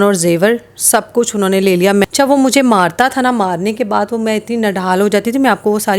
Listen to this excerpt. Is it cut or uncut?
cut